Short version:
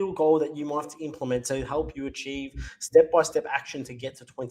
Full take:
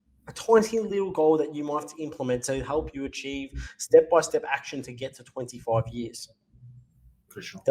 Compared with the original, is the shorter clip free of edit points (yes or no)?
yes